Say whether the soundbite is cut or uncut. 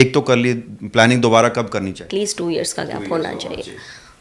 cut